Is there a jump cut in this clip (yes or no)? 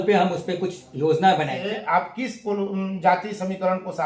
yes